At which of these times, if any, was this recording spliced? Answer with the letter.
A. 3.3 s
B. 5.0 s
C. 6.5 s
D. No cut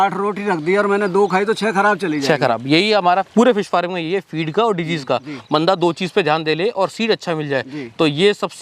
A